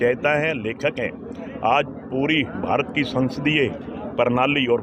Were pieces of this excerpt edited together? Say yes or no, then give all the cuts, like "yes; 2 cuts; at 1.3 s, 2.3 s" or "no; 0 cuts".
no; 0 cuts